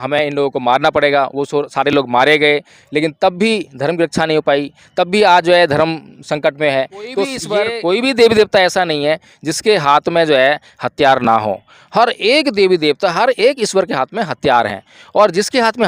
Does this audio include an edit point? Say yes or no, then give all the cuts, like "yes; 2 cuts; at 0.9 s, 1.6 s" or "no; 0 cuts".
yes; 1 cut; at 7.3 s